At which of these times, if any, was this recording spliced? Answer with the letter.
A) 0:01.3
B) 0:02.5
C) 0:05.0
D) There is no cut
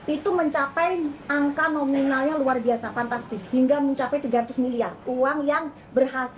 C